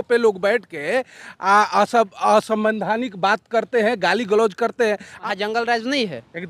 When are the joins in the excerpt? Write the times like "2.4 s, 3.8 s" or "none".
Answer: 5.1 s